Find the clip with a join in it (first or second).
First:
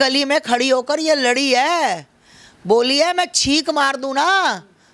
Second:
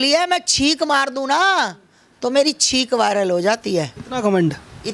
second